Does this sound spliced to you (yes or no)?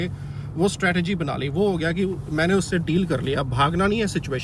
no